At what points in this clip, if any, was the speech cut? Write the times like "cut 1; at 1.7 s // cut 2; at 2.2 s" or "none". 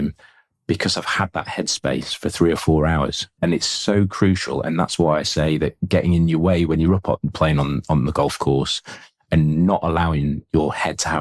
cut 1; at 3.3 s // cut 2; at 9.2 s